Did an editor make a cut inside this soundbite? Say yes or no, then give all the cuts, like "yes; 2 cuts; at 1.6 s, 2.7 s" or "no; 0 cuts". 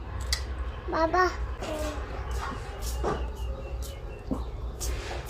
yes; 1 cut; at 1.6 s